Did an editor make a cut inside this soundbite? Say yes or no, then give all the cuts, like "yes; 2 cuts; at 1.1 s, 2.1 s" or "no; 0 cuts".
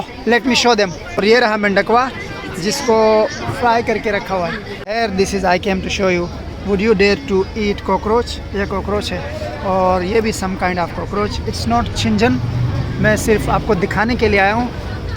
yes; 3 cuts; at 1.2 s, 4.7 s, 11.5 s